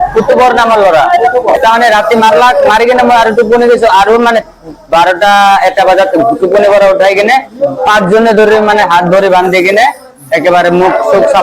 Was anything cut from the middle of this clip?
no; 0 cuts

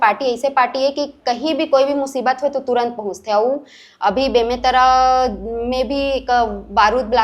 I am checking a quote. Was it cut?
no; 0 cuts

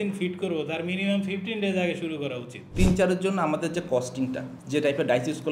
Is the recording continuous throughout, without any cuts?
no; 1 cut; at 2.7 s

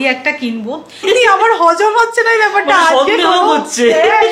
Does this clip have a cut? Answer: yes; 1 cut; at 1.0 s

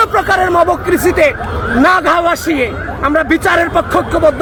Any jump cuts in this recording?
no; 0 cuts

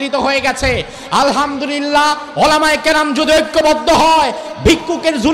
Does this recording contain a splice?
no; 0 cuts

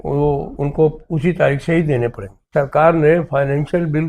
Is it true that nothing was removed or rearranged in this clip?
no; 1 cut; at 2.5 s

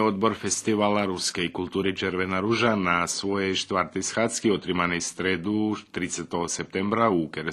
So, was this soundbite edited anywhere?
no; 0 cuts

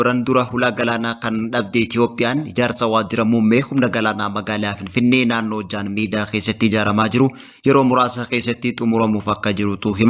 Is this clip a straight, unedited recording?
yes; 0 cuts

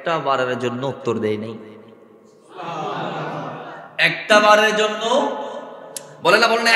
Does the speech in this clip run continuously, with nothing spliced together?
yes; 0 cuts

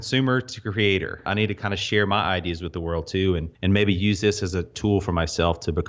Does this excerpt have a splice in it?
yes; 3 cuts; at 1.3 s, 3.5 s, 4.7 s

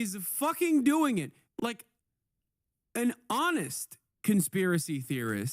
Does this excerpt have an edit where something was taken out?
yes; 1 cut; at 1.4 s

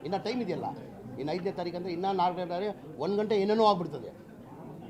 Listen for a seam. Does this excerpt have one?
no; 0 cuts

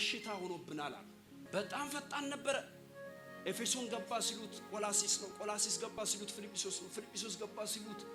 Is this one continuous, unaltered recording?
yes; 0 cuts

